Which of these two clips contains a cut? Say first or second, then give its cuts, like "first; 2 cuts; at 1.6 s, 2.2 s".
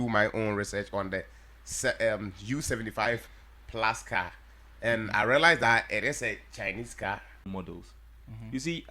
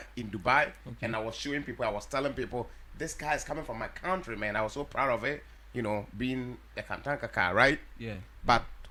first; 1 cut; at 7.5 s